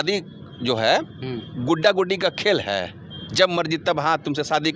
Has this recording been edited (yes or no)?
no